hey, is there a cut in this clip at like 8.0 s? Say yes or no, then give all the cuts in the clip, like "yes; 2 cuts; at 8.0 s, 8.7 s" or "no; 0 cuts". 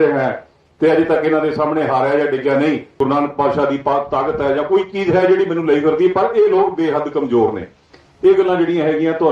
no; 1 cut; at 2.9 s